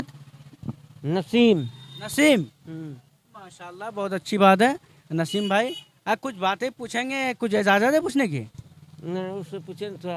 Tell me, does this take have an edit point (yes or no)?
no